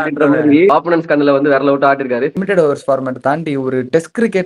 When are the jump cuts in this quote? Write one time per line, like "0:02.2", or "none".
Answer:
0:00.7
0:02.4